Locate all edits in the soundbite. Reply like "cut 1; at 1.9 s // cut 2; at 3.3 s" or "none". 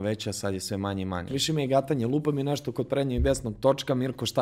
cut 1; at 1.3 s